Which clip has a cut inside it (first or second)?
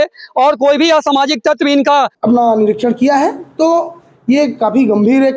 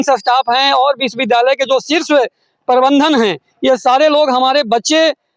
first